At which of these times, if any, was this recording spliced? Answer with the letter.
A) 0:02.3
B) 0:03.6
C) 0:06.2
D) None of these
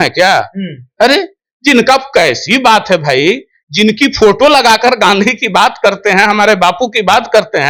D